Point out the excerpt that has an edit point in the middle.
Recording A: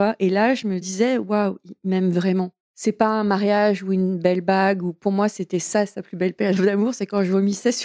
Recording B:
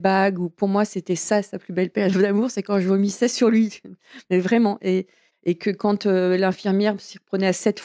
A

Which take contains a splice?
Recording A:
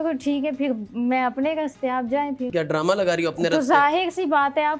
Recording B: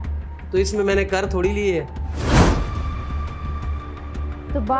A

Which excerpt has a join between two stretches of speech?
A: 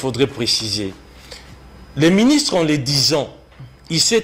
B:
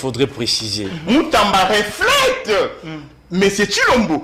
B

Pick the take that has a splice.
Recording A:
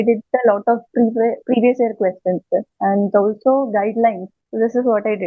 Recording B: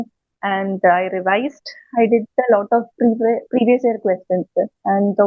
A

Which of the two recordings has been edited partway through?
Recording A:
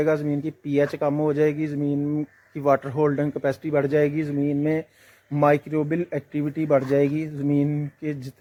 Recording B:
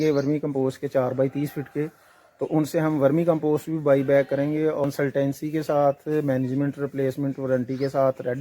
B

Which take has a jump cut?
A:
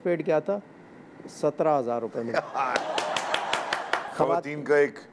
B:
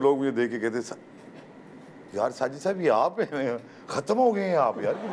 A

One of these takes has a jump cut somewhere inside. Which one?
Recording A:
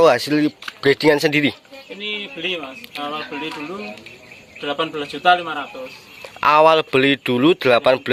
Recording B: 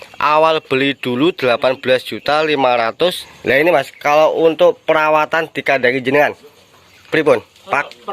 B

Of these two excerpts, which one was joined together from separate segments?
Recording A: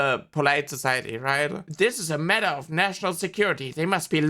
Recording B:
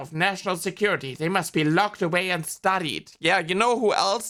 A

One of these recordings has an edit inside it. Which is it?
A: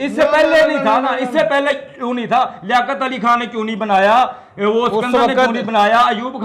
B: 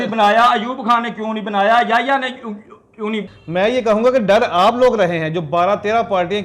B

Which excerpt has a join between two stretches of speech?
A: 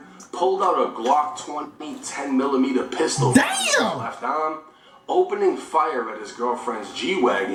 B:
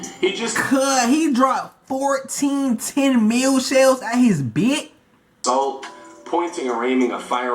B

